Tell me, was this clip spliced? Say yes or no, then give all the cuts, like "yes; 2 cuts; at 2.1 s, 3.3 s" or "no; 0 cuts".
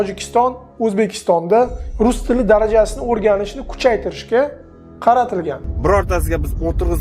yes; 1 cut; at 5.7 s